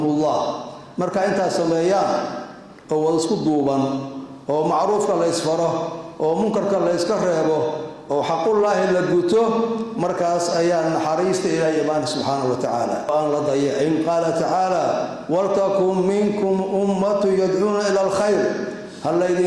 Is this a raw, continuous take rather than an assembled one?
no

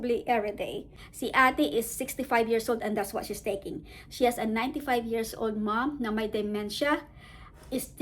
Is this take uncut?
no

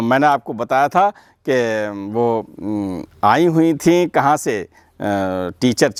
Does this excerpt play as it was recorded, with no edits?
yes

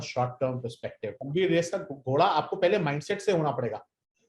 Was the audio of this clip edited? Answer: yes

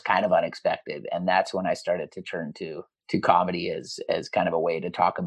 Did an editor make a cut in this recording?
yes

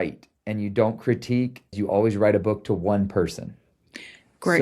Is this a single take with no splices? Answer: no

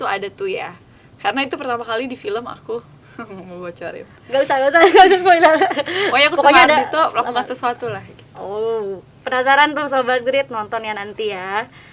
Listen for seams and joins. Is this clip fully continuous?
yes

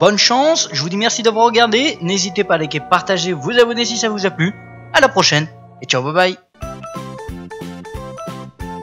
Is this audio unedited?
yes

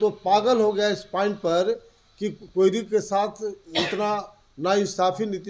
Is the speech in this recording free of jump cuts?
yes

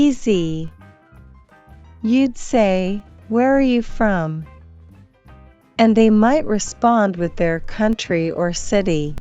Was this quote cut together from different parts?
no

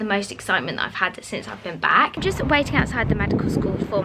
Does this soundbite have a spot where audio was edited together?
no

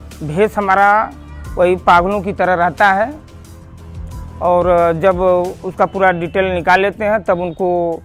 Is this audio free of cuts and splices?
yes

